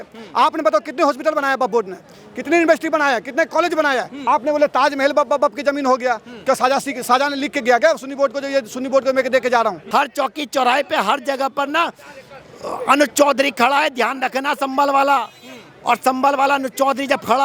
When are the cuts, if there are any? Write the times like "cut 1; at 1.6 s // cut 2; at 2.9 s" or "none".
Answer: cut 1; at 4.1 s // cut 2; at 9.8 s